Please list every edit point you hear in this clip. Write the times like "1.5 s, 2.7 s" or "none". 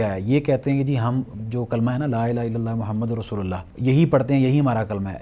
3.7 s